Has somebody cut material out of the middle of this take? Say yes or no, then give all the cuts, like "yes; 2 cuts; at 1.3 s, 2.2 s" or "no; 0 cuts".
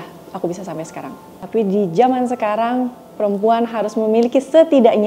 yes; 1 cut; at 1.3 s